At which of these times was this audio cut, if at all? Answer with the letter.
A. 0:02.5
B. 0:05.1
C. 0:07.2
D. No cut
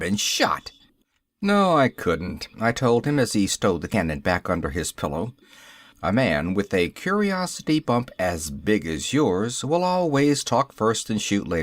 C